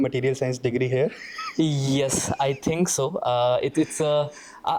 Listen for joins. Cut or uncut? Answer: uncut